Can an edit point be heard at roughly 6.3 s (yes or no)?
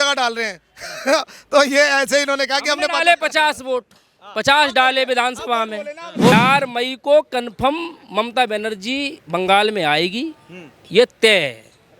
yes